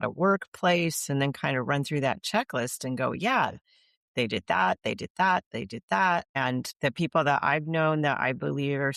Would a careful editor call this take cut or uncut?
uncut